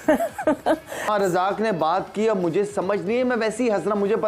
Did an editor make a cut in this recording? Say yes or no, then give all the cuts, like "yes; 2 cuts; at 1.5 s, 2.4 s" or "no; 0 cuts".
yes; 1 cut; at 0.9 s